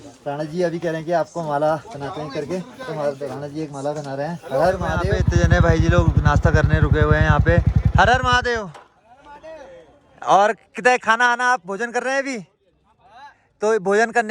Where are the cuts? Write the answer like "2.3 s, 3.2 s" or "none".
5.1 s

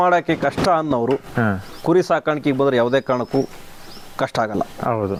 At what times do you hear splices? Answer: none

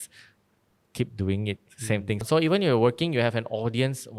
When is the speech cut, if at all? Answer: 2.2 s

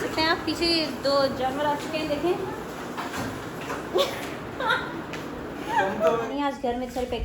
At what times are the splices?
3.1 s, 6.3 s

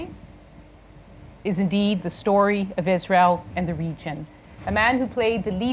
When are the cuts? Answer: none

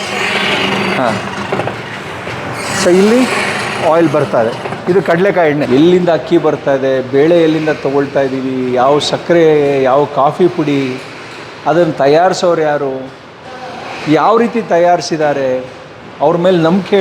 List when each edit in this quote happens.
5.7 s

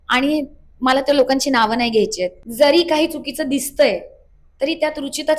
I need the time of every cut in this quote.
2.4 s

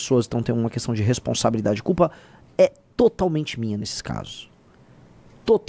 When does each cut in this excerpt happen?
none

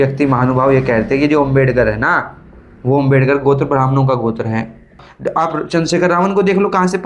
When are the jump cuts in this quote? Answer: 4.9 s

